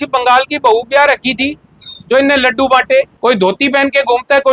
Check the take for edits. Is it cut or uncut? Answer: cut